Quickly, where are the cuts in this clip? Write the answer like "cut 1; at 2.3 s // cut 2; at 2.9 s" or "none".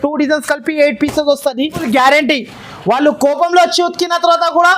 cut 1; at 1.8 s